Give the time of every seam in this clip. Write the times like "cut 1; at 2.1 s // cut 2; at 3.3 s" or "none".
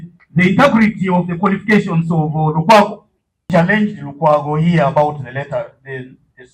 cut 1; at 3.5 s